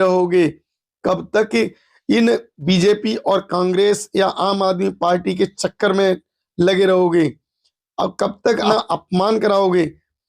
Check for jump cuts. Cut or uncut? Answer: cut